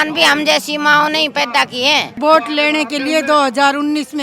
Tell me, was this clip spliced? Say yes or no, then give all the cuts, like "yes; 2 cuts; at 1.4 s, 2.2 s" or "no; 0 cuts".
yes; 1 cut; at 2.2 s